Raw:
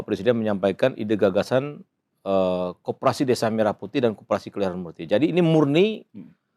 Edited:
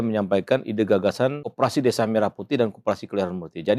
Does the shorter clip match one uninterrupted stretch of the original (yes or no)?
no